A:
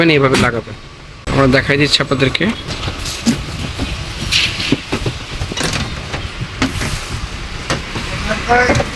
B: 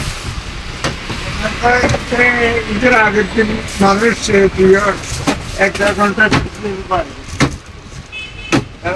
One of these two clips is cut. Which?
A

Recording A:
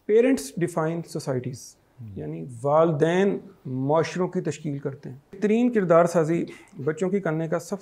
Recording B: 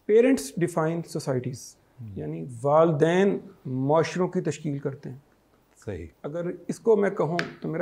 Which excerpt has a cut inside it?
A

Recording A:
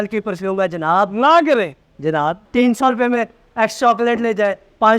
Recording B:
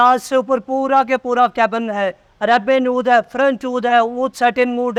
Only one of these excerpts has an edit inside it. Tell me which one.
A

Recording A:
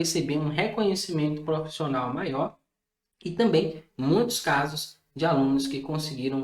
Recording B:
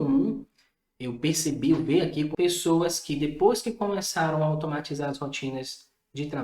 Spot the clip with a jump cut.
B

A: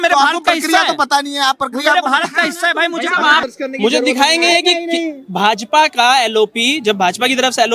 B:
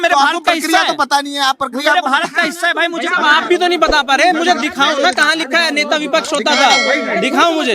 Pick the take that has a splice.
A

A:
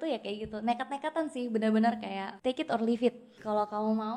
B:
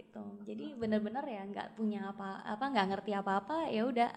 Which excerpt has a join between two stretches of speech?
A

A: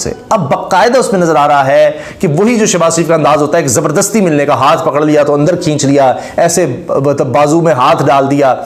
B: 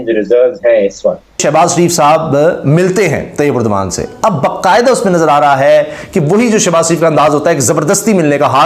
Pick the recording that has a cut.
B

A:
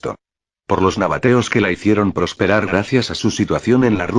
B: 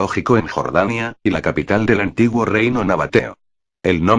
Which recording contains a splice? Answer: A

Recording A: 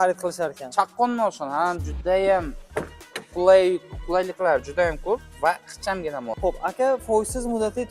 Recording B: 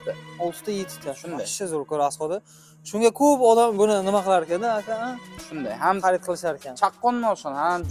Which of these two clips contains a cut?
A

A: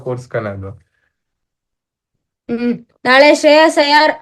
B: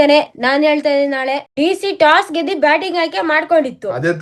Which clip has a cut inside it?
B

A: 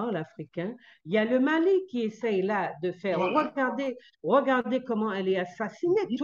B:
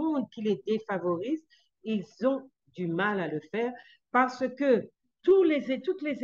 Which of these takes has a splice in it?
A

